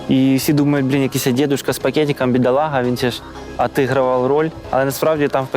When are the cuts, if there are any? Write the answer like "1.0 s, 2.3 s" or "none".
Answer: 4.6 s